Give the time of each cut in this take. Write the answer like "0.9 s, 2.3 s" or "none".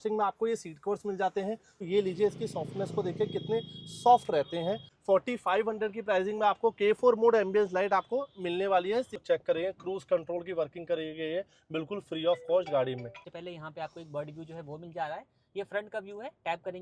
1.8 s, 4.9 s, 9.2 s, 13.2 s